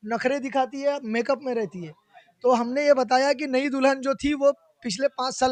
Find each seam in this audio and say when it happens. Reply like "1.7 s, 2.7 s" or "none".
none